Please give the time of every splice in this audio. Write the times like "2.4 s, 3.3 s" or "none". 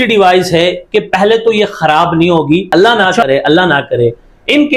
2.7 s